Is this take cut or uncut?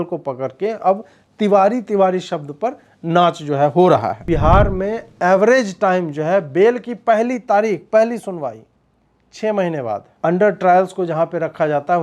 cut